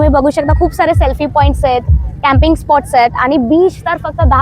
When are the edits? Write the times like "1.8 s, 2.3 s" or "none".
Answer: none